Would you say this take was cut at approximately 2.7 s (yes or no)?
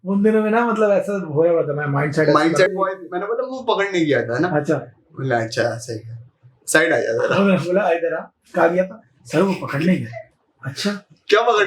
yes